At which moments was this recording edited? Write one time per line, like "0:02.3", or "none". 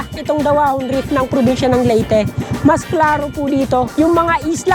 none